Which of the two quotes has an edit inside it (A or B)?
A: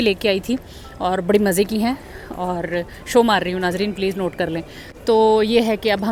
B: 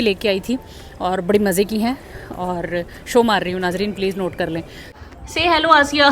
B